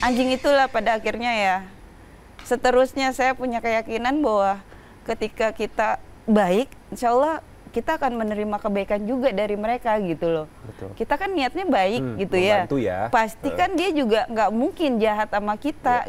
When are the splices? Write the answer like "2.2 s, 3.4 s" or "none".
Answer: none